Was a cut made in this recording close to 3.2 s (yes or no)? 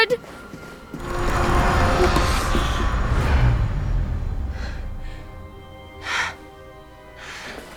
no